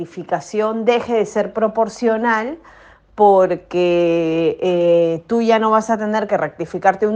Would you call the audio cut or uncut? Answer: uncut